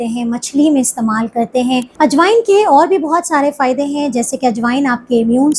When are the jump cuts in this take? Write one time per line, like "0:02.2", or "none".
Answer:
0:01.9